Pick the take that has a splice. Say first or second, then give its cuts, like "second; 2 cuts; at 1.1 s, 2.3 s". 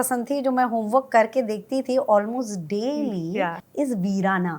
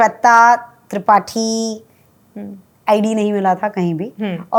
first; 1 cut; at 3.6 s